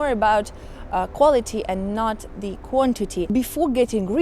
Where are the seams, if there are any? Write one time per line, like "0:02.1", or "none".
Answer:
0:03.3